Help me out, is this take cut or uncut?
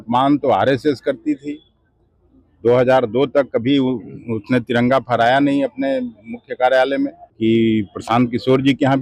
cut